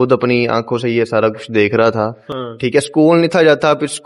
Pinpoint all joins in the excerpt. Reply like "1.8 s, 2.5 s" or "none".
2.3 s